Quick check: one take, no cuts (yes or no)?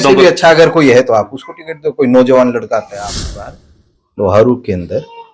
no